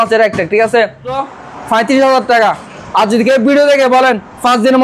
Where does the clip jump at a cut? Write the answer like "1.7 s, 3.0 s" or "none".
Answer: 1.2 s